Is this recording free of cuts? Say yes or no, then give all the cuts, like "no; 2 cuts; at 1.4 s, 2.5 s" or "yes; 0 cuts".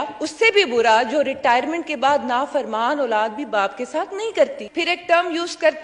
no; 1 cut; at 4.6 s